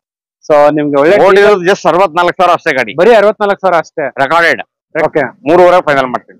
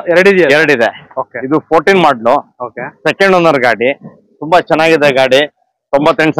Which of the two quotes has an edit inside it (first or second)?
first